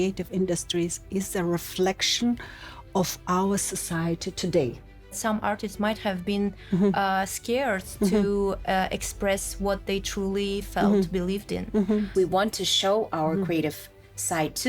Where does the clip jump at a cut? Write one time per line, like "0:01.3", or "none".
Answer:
0:05.2
0:12.1